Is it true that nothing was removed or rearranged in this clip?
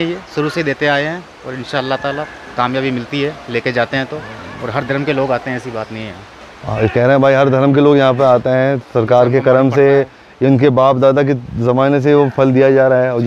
yes; 0 cuts

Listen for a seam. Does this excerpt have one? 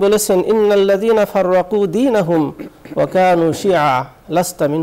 no; 0 cuts

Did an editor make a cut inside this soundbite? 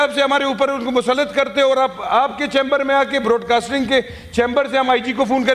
no; 0 cuts

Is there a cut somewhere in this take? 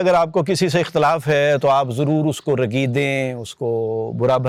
no; 0 cuts

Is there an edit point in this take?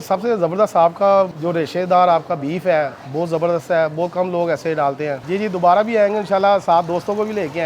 yes; 3 cuts; at 1.3 s, 3.0 s, 5.2 s

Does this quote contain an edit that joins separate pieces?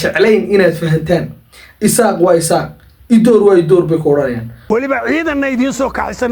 yes; 1 cut; at 4.5 s

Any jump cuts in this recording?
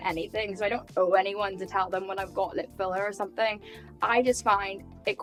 no; 0 cuts

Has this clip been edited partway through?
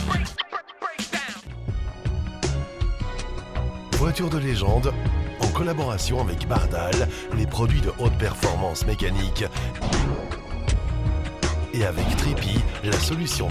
yes; 1 cut; at 1.5 s

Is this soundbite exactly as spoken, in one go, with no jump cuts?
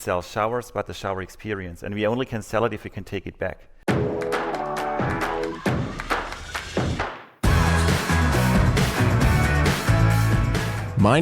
no; 1 cut; at 3.7 s

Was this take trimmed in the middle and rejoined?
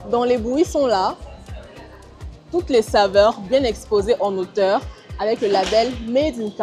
no; 0 cuts

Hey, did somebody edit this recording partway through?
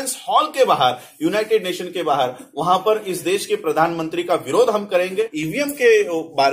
yes; 1 cut; at 5.4 s

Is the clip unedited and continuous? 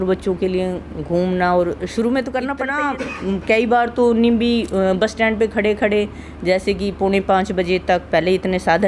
no; 1 cut; at 2.8 s

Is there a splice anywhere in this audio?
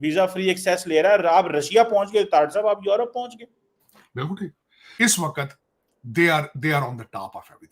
yes; 1 cut; at 4.8 s

